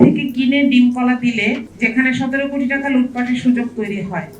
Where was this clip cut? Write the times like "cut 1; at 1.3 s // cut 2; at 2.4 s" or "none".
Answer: cut 1; at 1.7 s